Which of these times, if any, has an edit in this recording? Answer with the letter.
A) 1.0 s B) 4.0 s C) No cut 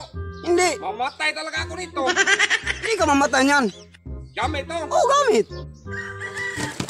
C